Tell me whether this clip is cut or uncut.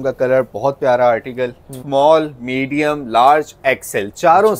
cut